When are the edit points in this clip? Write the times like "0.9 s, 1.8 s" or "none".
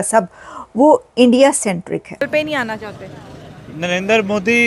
2.3 s